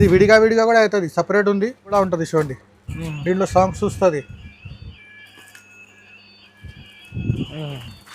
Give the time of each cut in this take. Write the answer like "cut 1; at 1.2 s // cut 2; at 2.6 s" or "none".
cut 1; at 1.9 s